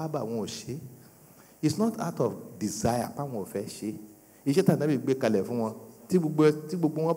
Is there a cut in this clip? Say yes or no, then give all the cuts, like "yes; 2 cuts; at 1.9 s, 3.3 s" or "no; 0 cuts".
no; 0 cuts